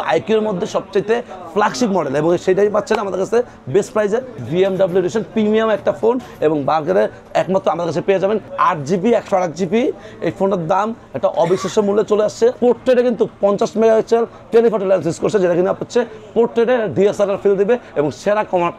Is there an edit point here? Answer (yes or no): yes